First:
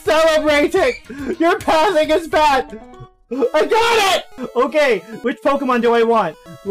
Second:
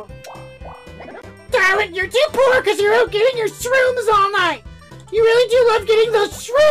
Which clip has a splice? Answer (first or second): first